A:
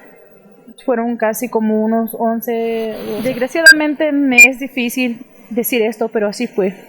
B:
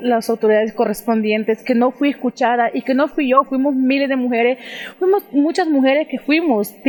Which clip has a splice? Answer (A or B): A